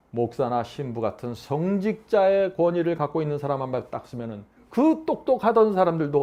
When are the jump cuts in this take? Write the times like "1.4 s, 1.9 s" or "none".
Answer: none